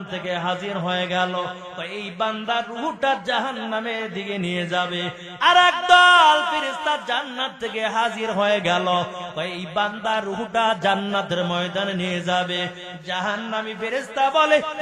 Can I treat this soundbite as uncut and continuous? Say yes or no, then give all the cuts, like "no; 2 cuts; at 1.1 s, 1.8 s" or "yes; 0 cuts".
yes; 0 cuts